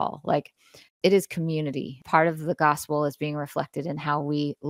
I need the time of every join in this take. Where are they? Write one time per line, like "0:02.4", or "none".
0:02.0

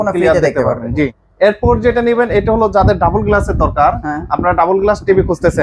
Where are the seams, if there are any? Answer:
0:01.2

